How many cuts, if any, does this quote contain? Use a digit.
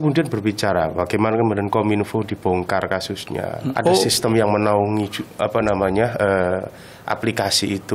1